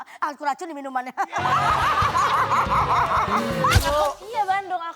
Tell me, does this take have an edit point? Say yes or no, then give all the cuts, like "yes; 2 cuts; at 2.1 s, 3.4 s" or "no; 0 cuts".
yes; 1 cut; at 3.8 s